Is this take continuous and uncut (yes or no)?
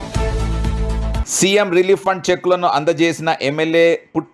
no